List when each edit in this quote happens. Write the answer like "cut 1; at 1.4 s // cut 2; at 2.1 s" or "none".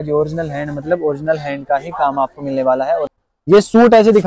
cut 1; at 3.1 s